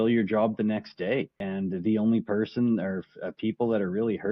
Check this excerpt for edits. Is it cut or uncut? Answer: cut